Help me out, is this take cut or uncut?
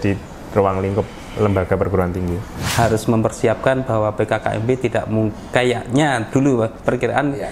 cut